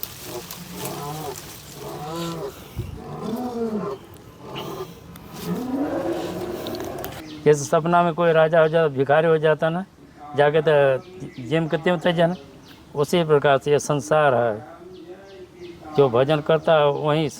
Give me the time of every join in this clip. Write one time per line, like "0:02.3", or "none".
0:07.2